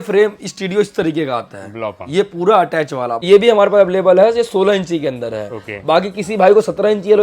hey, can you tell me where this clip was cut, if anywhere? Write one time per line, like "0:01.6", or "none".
0:03.2